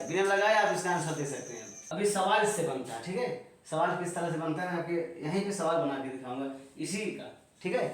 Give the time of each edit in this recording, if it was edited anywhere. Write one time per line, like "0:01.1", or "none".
0:01.9